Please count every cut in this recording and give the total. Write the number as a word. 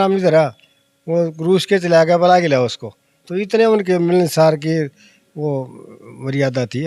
zero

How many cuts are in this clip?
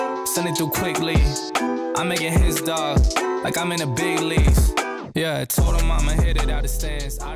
zero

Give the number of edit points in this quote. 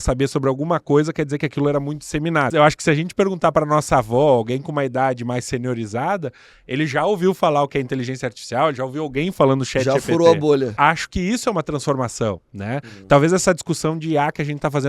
two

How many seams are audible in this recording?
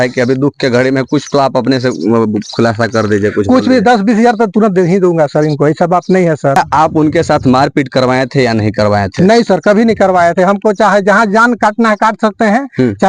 one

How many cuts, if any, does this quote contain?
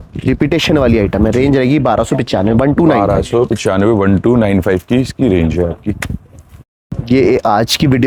zero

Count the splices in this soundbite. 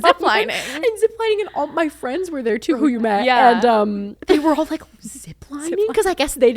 two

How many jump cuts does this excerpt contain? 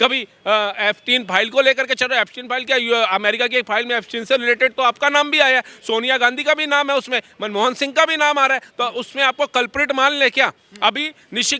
zero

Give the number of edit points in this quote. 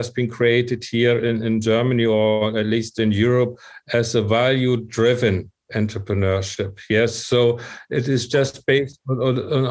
zero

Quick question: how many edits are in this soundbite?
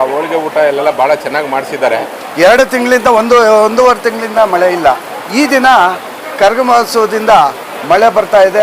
three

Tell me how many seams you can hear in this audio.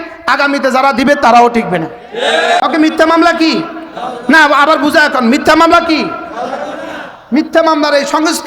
one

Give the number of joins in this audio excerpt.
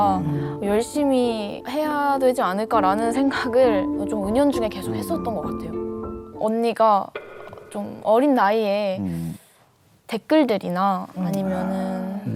one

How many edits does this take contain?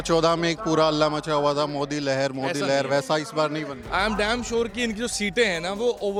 zero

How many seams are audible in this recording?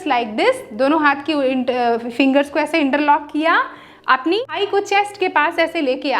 one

